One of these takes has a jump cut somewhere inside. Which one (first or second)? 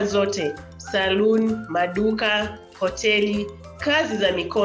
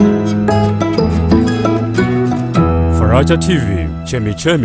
second